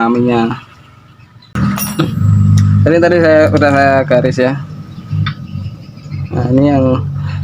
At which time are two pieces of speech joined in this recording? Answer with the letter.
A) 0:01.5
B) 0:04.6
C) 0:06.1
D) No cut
A